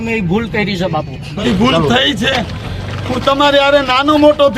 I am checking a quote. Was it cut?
yes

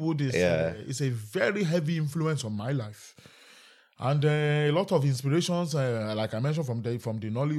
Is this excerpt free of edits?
yes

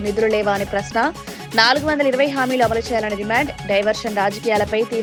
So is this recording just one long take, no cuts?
yes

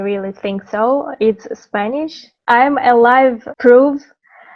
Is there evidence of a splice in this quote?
yes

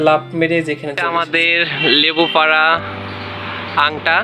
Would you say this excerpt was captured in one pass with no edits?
no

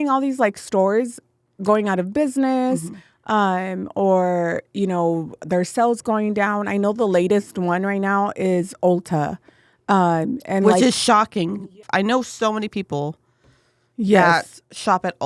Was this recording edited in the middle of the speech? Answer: yes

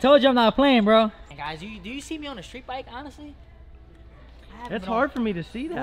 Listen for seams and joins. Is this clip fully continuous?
no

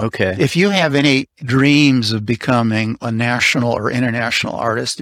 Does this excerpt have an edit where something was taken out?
yes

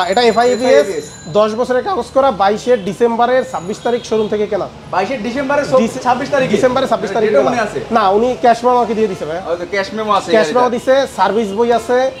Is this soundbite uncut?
yes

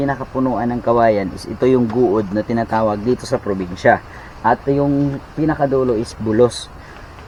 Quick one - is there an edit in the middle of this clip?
no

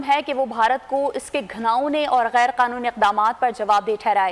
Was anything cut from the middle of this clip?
no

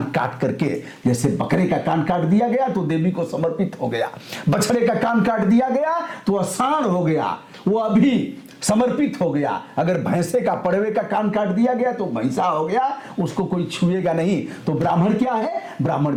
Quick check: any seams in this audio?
no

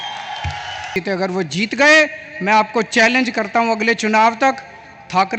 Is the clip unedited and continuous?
no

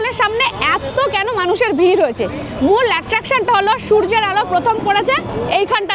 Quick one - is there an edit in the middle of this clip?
no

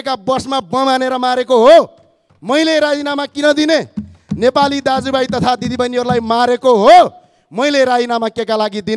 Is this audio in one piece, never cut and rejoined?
yes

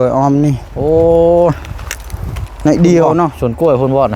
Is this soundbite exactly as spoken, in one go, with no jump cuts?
yes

